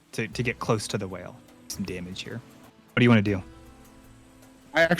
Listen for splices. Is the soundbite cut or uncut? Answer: cut